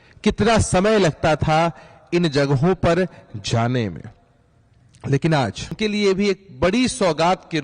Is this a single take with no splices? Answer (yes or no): no